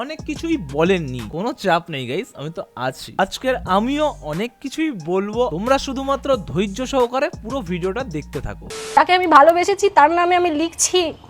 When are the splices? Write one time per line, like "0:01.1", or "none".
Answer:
0:01.2
0:05.5
0:09.0